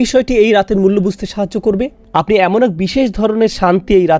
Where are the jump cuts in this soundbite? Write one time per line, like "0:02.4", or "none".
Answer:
0:02.0